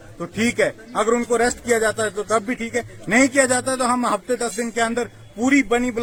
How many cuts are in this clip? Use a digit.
0